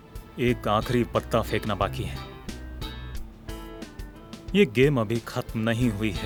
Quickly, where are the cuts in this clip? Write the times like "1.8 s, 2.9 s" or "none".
none